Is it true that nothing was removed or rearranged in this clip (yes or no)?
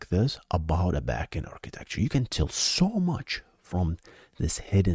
yes